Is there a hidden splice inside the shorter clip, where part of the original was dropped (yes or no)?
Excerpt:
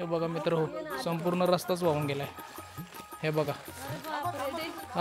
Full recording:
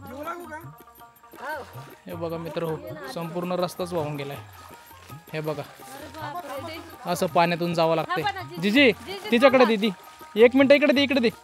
no